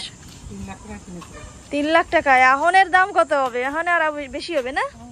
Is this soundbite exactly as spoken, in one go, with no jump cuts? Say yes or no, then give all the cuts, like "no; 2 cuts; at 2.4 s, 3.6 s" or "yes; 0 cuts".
yes; 0 cuts